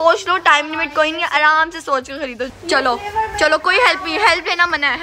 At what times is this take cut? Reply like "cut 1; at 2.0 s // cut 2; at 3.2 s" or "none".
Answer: cut 1; at 2.5 s